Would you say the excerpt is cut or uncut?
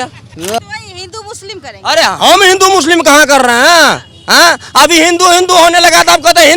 uncut